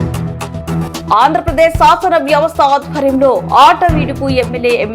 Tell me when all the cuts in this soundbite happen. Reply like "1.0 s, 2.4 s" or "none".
1.0 s

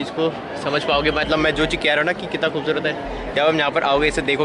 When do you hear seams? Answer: none

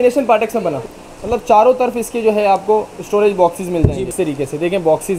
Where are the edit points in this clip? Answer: 0.8 s, 4.1 s

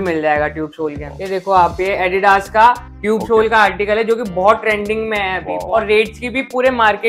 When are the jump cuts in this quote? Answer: 1.1 s, 5.6 s

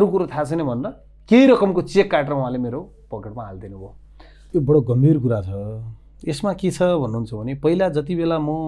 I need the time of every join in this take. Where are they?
4.4 s

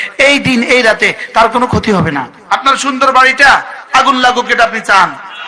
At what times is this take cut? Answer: 2.4 s

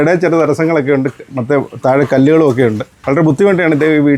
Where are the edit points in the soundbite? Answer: none

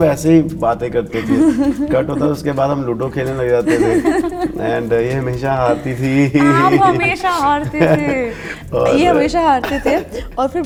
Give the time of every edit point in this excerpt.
none

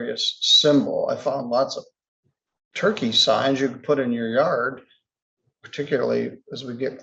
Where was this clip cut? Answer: none

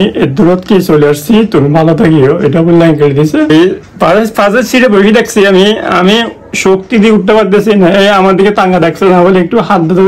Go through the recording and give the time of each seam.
3.5 s

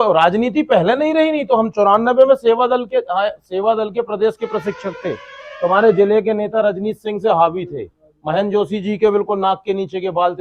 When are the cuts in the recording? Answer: none

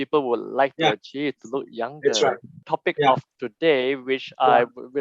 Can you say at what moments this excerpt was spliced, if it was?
2.7 s

